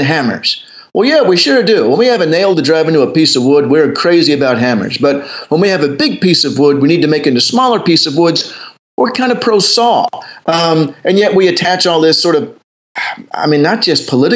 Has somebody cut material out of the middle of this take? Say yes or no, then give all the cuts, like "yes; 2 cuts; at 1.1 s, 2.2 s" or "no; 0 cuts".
no; 0 cuts